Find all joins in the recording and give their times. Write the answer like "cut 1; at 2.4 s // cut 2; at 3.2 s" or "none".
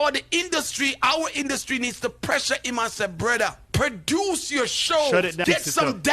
cut 1; at 3.6 s // cut 2; at 5.4 s

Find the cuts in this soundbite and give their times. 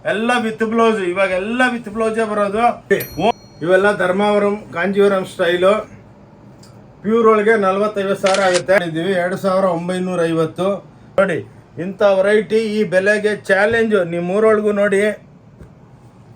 cut 1; at 3.1 s // cut 2; at 8.8 s // cut 3; at 11.0 s

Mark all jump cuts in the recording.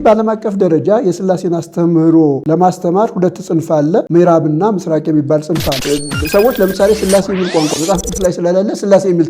cut 1; at 2.4 s // cut 2; at 4.1 s // cut 3; at 5.7 s

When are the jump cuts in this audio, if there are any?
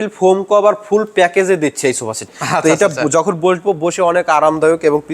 cut 1; at 2.2 s

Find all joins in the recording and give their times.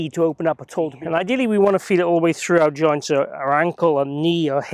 cut 1; at 0.9 s

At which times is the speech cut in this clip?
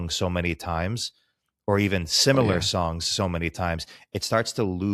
none

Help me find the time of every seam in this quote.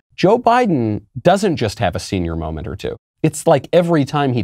cut 1; at 1.1 s // cut 2; at 3.0 s

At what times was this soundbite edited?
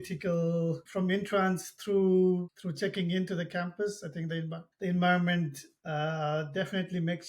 cut 1; at 0.8 s // cut 2; at 2.6 s // cut 3; at 4.6 s

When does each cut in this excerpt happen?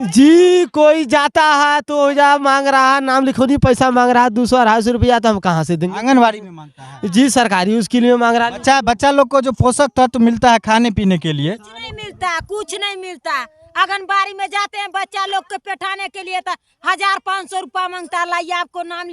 none

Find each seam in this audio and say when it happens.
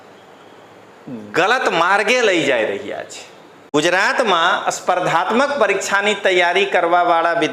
cut 1; at 3.5 s

